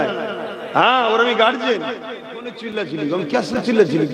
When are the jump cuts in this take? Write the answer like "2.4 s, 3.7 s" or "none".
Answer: 2.6 s